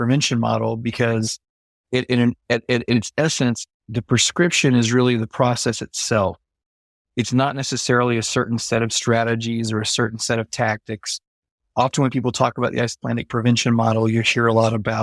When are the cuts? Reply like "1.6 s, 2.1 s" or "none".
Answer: none